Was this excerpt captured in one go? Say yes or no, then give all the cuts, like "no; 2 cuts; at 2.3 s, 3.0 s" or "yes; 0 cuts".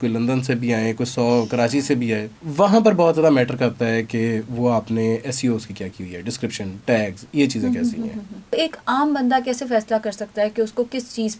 no; 2 cuts; at 2.4 s, 8.5 s